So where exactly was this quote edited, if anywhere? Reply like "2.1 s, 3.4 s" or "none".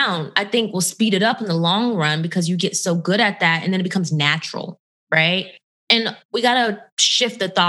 none